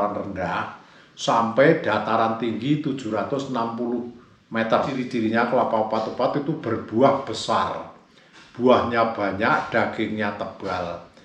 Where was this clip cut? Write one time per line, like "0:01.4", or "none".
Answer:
0:05.0